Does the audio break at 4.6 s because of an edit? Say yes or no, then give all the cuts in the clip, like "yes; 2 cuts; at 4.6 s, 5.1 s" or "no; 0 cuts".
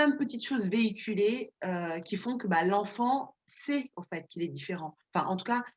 no; 0 cuts